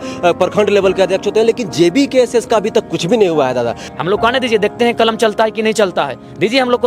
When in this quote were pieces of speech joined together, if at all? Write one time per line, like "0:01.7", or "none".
0:03.8